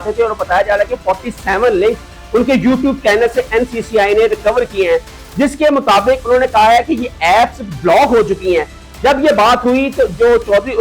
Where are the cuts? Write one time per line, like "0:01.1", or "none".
none